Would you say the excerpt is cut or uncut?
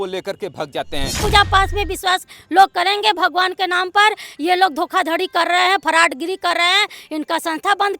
cut